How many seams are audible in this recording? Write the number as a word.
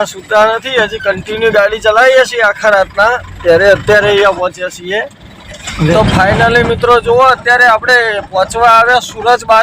one